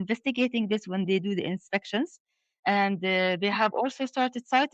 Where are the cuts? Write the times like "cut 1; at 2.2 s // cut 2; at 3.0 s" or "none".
none